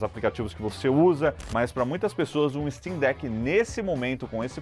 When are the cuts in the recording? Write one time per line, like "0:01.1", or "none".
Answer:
0:01.4